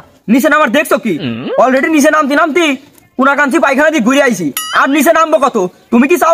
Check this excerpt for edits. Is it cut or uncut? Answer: uncut